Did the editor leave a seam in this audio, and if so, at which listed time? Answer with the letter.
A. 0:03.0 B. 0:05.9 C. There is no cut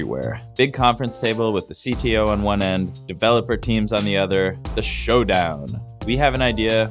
A